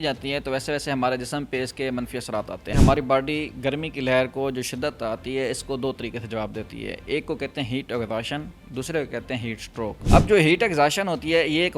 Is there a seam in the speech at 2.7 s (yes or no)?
yes